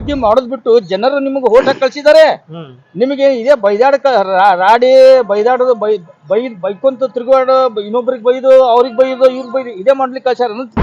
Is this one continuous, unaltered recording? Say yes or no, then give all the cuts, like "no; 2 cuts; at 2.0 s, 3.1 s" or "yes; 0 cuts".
yes; 0 cuts